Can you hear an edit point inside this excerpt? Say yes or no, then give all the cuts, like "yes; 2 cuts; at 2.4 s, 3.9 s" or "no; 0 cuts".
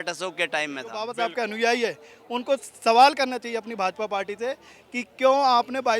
yes; 1 cut; at 1.0 s